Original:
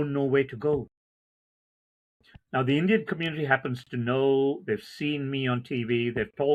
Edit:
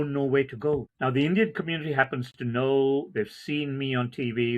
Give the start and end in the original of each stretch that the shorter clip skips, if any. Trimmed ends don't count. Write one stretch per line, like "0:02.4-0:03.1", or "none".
0:00.9-0:02.4